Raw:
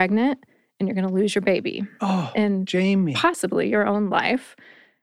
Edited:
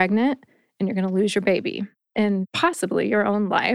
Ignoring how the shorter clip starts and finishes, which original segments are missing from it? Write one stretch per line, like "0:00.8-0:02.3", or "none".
0:02.4-0:03.0